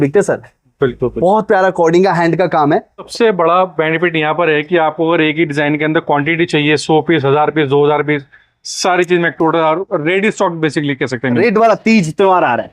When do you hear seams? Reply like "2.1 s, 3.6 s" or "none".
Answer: 3.0 s, 11.4 s